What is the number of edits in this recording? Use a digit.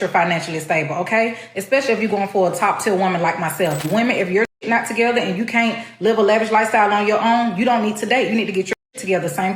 1